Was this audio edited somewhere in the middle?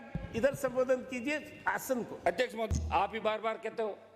yes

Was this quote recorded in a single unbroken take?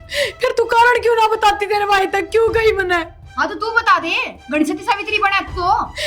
yes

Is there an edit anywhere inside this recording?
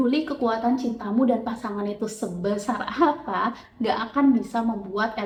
no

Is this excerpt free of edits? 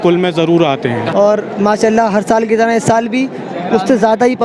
no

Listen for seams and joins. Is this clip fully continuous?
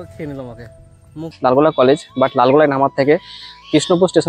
no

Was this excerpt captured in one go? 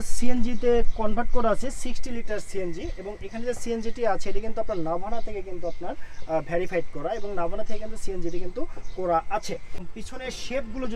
no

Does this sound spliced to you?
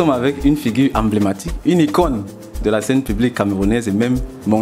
no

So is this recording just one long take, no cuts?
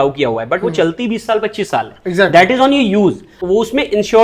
no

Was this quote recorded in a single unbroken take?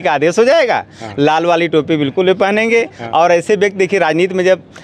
yes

